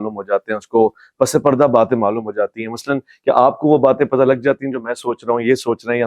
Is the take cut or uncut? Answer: uncut